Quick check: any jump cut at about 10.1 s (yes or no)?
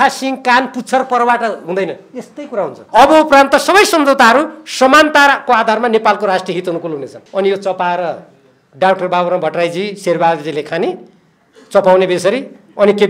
no